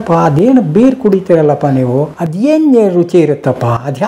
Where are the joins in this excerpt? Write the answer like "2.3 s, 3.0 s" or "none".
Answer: 2.2 s